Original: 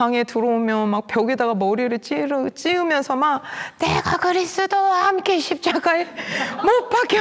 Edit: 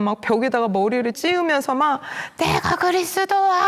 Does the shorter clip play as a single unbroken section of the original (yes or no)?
no